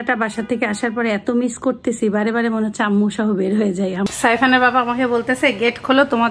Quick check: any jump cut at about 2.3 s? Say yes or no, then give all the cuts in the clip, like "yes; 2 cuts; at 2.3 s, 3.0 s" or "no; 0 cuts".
no; 1 cut; at 4.1 s